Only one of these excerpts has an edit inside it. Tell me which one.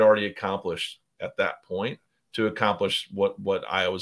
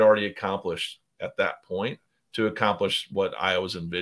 second; 1 cut; at 3.1 s

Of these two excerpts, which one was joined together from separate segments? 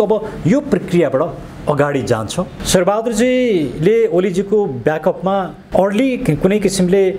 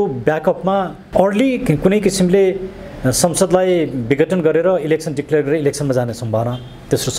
first; 1 cut; at 2.6 s

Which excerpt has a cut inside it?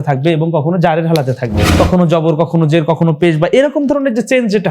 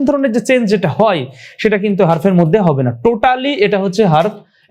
first; 1 cut; at 1.6 s

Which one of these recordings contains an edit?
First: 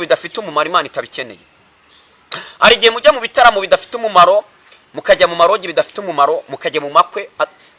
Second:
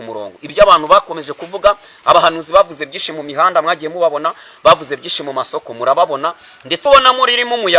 second; 1 cut; at 6.8 s

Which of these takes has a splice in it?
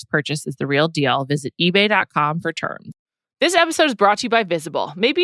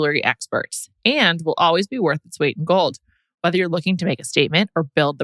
first; 1 cut; at 2.9 s

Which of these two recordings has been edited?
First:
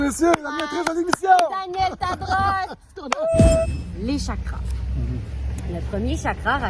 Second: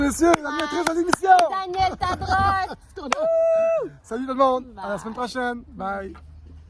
first; 1 cut; at 3.6 s

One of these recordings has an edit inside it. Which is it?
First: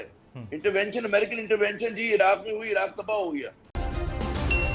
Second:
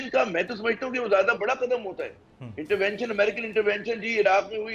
first; 1 cut; at 3.8 s

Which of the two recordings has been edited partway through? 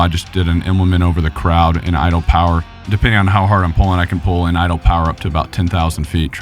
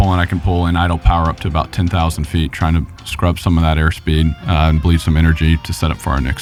first; 1 cut; at 2.7 s

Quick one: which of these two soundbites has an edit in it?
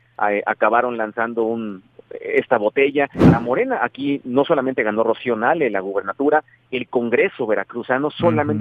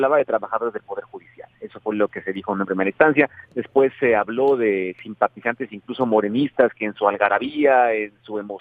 first; 1 cut; at 3.2 s

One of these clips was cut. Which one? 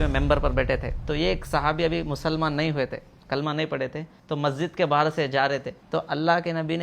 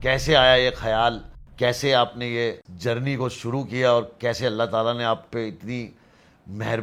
first; 3 cuts; at 1.0 s, 4.1 s, 5.7 s

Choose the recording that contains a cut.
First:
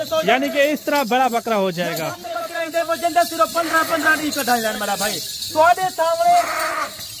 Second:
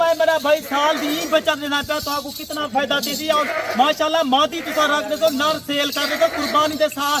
first; 1 cut; at 2.4 s

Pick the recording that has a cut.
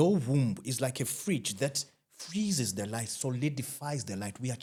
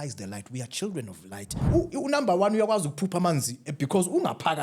second; 1 cut; at 1.6 s

